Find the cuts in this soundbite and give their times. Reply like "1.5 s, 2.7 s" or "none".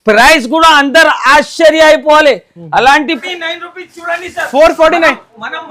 3.2 s